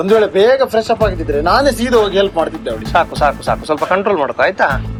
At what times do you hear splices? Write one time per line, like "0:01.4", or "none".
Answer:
none